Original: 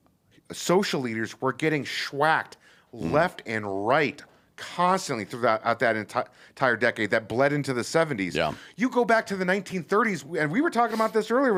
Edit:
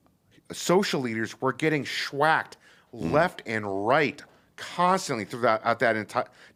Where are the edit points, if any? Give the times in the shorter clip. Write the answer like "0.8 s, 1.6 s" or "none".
none